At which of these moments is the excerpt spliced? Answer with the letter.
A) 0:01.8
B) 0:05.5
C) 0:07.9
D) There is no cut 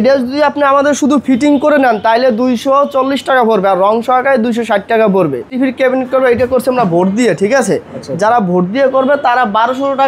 B